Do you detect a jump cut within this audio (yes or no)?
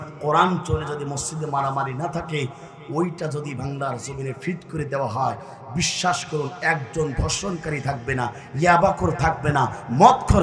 no